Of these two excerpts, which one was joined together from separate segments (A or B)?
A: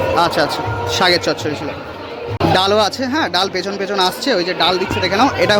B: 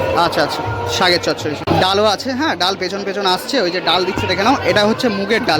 B